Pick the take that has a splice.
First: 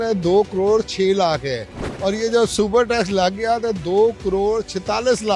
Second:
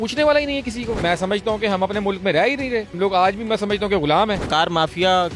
second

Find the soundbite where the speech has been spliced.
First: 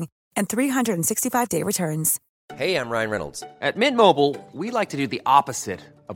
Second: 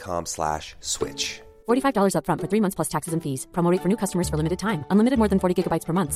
first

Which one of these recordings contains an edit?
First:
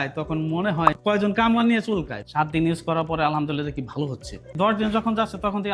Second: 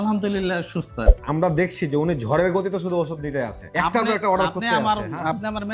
first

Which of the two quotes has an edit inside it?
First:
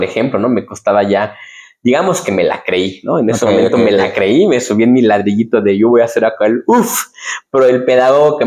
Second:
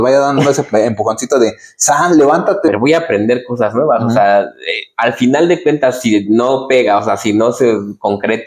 second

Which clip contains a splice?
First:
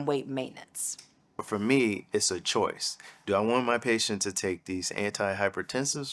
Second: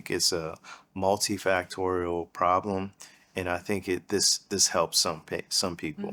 first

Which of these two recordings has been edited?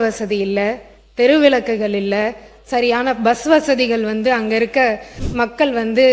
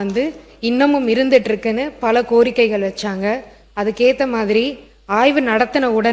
first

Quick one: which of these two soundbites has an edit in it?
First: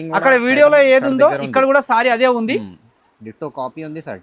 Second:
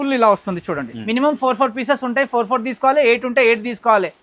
second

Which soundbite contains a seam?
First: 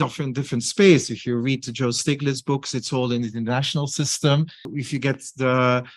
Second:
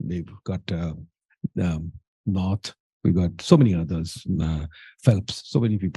first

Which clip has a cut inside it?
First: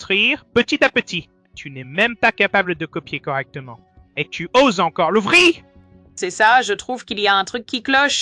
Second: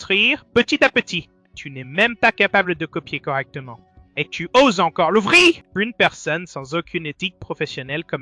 second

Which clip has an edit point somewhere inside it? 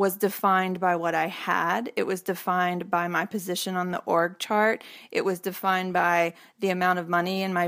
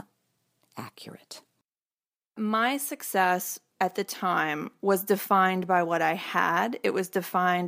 second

